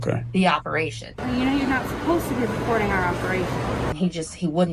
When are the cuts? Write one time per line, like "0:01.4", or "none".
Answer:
0:01.1
0:03.9